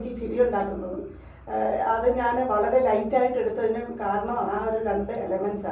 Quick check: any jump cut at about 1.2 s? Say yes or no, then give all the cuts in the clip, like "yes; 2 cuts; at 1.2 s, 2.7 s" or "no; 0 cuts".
no; 0 cuts